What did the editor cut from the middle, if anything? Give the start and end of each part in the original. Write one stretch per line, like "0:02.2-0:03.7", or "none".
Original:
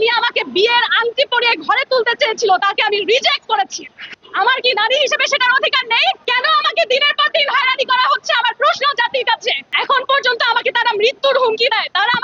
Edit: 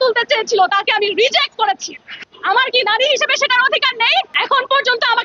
0:06.2-0:09.7